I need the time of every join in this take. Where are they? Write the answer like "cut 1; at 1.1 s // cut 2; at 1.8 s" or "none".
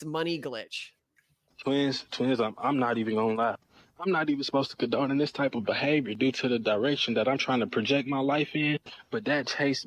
cut 1; at 1.4 s